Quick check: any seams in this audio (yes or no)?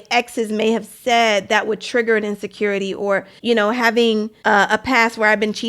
yes